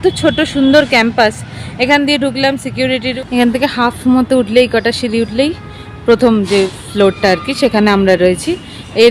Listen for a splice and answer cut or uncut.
cut